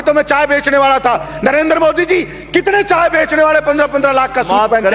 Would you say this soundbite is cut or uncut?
cut